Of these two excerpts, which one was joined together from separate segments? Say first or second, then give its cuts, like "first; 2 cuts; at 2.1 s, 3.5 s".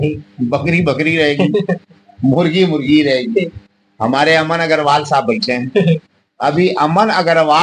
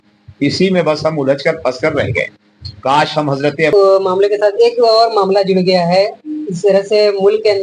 second; 1 cut; at 3.7 s